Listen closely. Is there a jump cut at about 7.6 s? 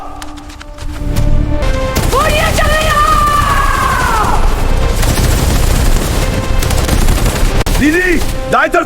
yes; 2 cuts; at 1.6 s, 7.6 s

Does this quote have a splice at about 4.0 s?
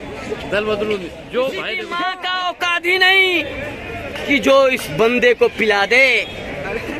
no; 1 cut; at 2.0 s

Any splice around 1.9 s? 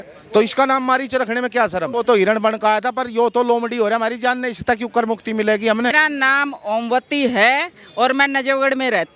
yes; 2 cuts; at 1.9 s, 5.9 s

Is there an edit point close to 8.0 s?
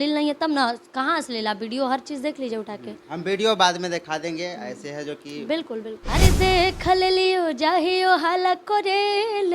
no; 1 cut; at 6.0 s

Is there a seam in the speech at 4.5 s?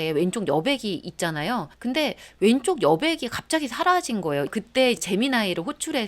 yes; 2 cuts; at 2.1 s, 4.5 s

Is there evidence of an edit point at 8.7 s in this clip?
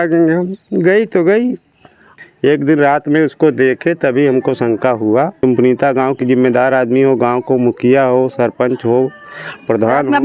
no; 2 cuts; at 2.2 s, 5.3 s

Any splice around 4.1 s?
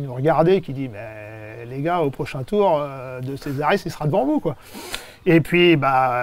no; 0 cuts

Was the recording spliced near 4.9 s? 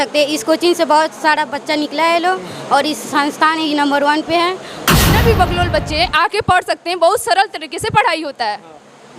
yes; 1 cut; at 4.9 s

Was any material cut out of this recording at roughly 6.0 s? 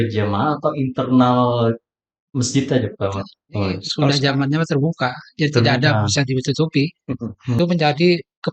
no; 2 cuts; at 3.9 s, 7.6 s

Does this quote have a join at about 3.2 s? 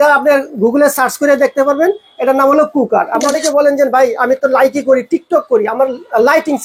yes; 1 cut; at 3.2 s

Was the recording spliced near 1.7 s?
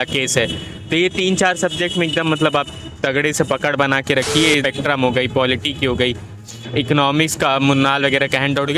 no; 1 cut; at 4.6 s

